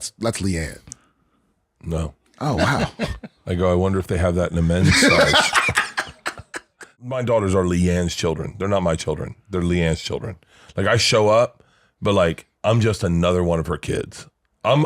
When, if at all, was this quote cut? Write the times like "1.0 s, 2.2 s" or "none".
7.1 s